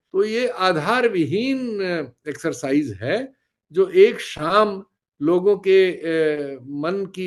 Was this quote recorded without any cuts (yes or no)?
yes